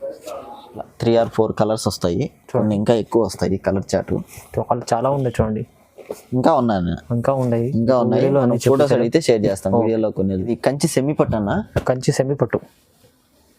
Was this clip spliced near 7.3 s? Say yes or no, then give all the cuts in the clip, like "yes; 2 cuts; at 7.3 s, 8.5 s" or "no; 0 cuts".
no; 2 cuts; at 0.9 s, 10.5 s